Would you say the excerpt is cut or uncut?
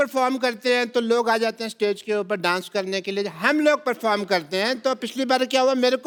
uncut